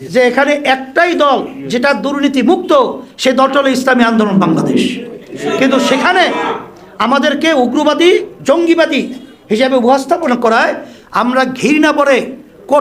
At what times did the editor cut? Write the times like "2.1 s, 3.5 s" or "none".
none